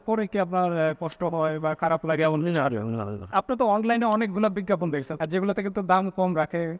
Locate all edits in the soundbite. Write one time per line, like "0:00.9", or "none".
0:03.3
0:05.1